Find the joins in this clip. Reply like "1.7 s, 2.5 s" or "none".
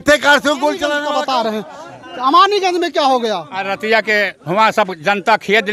1.0 s